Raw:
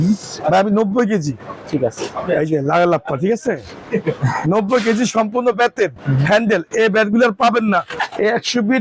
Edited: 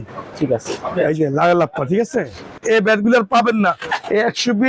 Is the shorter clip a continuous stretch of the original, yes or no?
no